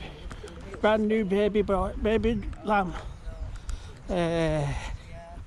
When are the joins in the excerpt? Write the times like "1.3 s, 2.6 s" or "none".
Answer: none